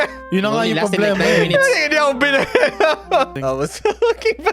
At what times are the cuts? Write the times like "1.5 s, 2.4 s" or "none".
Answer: 3.3 s